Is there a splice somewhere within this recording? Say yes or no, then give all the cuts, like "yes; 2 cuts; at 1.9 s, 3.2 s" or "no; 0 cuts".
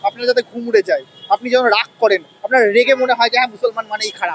no; 0 cuts